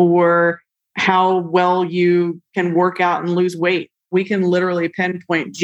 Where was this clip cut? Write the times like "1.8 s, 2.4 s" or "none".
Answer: 4.0 s